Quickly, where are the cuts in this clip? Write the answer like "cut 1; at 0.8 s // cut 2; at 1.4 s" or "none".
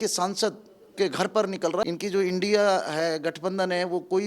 cut 1; at 1.8 s